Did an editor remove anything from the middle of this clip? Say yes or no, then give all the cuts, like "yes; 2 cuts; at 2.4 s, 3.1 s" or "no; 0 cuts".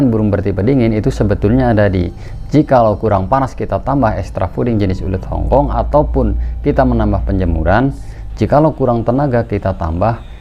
no; 0 cuts